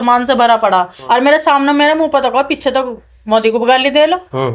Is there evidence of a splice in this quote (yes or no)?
yes